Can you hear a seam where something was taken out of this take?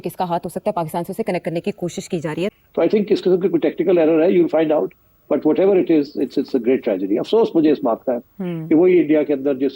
yes; 1 cut; at 2.6 s

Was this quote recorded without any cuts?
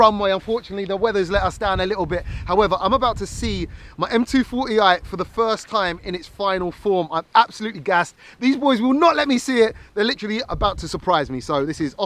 yes; 0 cuts

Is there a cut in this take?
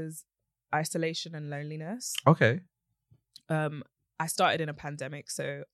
no; 0 cuts

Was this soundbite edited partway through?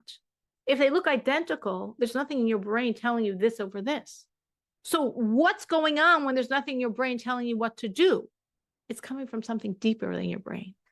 no; 0 cuts

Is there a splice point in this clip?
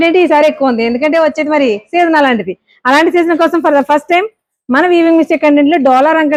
no; 0 cuts

